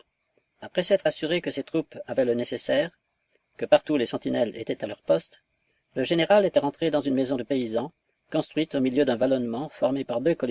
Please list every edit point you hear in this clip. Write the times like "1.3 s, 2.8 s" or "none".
5.8 s

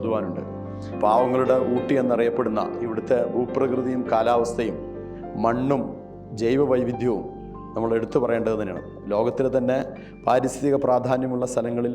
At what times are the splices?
0.9 s

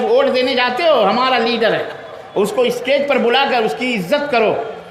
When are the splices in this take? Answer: none

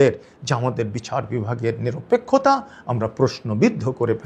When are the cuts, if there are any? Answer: none

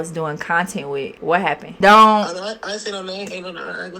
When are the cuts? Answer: 1.4 s

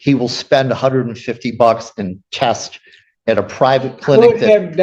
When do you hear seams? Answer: none

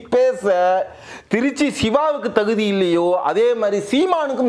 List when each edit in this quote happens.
none

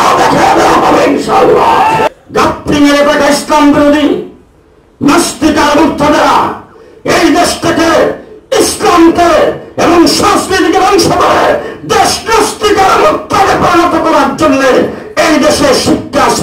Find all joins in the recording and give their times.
2.1 s

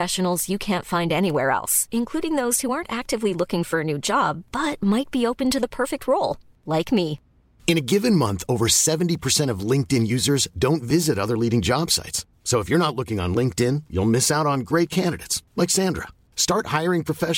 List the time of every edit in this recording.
none

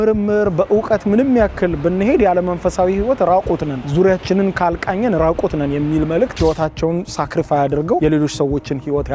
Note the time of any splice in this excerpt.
6.3 s

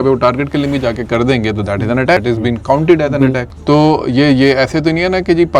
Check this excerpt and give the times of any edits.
2.2 s, 3.5 s

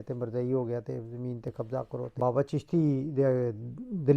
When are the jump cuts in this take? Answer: 2.1 s

